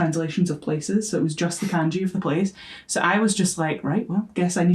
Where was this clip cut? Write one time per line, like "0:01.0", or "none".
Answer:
none